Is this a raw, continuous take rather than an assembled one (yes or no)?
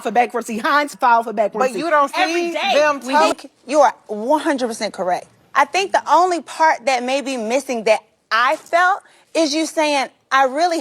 no